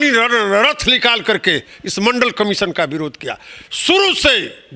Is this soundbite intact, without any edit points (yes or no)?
yes